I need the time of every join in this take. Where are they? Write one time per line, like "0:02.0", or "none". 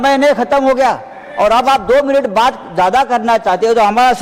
none